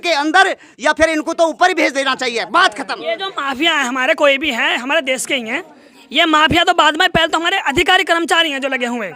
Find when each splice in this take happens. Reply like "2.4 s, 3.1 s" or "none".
none